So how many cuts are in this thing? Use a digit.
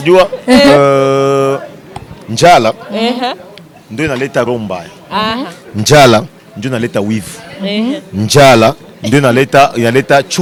0